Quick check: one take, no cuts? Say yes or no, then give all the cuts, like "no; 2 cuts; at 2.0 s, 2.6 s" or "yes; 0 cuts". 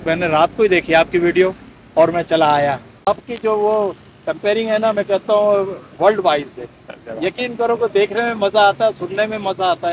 no; 1 cut; at 3.0 s